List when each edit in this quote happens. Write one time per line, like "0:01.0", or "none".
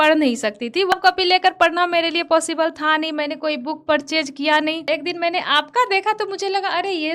0:00.9
0:04.9